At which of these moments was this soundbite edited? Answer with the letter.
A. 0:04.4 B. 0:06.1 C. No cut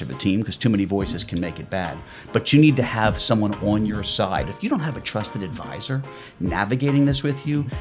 A